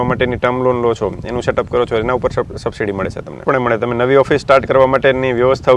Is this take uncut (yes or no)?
no